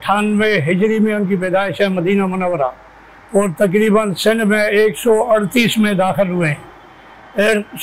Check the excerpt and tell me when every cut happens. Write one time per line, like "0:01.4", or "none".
none